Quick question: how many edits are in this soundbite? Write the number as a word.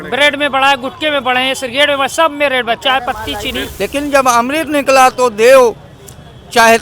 one